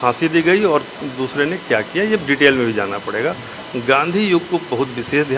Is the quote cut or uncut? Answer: uncut